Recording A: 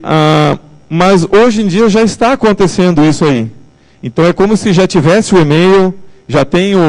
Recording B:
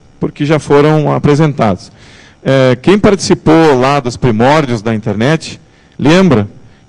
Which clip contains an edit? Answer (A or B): A